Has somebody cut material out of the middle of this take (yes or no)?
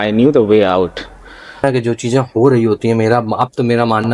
yes